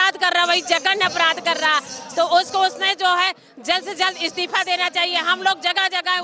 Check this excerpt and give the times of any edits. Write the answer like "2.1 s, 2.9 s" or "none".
none

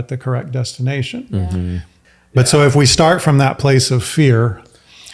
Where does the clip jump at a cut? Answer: 2.0 s

